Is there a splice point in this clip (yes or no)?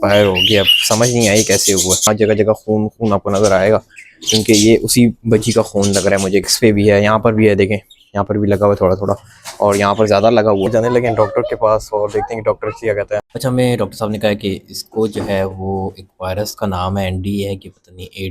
yes